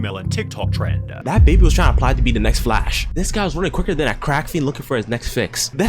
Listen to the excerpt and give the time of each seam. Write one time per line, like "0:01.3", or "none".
0:01.2